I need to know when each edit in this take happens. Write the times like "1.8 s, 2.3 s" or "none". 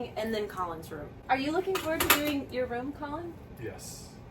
1.1 s, 3.5 s